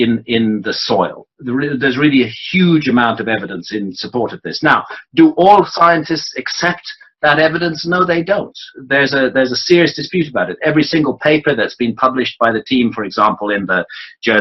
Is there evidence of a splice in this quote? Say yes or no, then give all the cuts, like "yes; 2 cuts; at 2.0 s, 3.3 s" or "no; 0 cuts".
yes; 1 cut; at 11.6 s